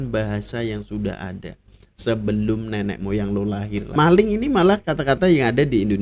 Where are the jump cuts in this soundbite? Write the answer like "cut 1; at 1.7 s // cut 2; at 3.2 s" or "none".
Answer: cut 1; at 3.9 s